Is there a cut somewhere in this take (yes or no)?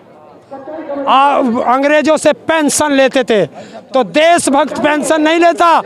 no